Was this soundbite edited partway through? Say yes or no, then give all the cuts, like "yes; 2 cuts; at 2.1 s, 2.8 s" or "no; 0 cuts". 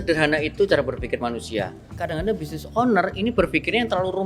yes; 1 cut; at 1.9 s